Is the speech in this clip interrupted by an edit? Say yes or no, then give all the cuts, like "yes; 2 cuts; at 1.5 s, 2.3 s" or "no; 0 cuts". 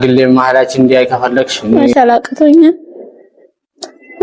yes; 1 cut; at 1.8 s